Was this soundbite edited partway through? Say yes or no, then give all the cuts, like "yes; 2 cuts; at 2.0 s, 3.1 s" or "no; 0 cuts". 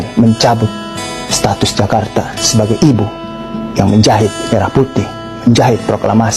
no; 0 cuts